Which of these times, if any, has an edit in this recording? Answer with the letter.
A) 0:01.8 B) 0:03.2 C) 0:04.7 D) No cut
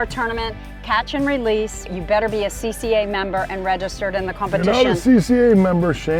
A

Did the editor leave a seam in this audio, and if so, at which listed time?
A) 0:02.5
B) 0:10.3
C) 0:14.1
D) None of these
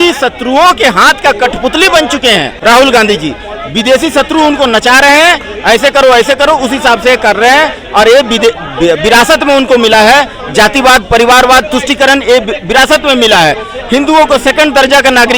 A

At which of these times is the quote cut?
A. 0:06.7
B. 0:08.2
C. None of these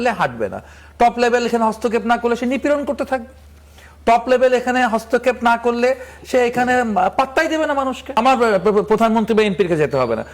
B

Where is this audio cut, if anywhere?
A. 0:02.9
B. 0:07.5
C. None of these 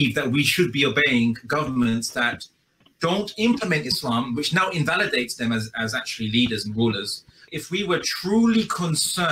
B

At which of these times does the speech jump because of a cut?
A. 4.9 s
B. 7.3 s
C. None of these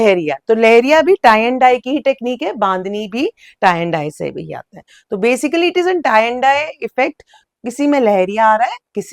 C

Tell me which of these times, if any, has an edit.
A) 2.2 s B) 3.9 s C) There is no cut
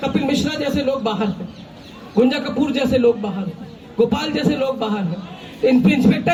C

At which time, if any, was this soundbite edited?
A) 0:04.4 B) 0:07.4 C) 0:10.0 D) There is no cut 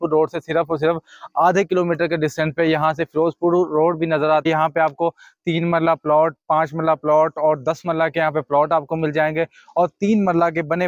A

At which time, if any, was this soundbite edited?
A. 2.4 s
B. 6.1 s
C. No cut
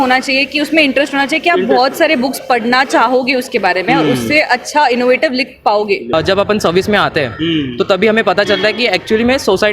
B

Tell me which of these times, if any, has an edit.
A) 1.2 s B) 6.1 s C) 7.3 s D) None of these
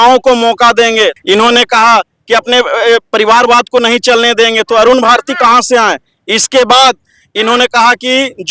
A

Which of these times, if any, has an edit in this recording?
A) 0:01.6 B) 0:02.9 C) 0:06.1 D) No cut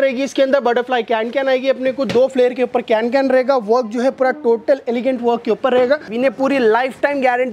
C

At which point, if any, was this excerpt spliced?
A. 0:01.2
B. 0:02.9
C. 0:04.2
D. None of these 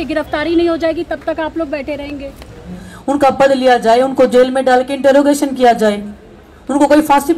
B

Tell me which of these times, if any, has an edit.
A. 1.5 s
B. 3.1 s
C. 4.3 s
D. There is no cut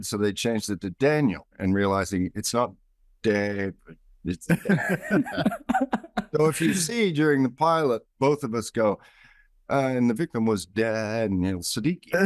A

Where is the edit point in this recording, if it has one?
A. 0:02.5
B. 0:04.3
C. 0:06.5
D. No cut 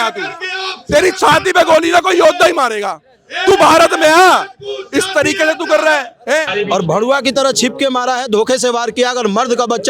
C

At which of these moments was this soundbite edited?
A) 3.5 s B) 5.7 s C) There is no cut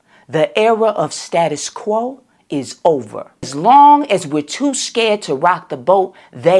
A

